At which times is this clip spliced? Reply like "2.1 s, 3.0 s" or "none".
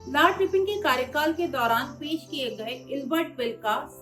none

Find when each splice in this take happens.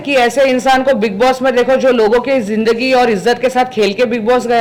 none

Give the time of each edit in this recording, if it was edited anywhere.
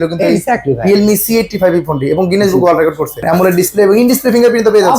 3.2 s

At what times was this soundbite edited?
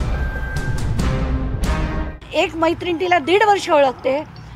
2.2 s

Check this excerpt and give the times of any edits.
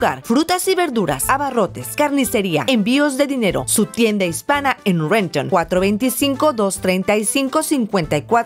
none

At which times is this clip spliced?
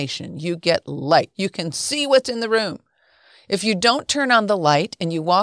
1.3 s

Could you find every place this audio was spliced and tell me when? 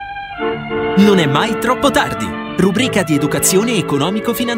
none

